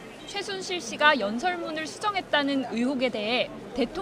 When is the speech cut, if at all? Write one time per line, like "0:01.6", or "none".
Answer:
0:01.3